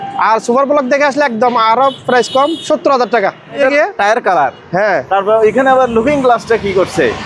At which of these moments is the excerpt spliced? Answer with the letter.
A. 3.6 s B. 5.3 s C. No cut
A